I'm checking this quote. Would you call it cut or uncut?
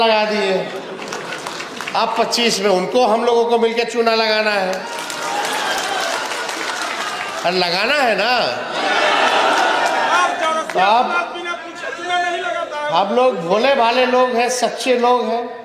uncut